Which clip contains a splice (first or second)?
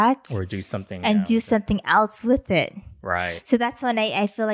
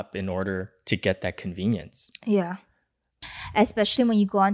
second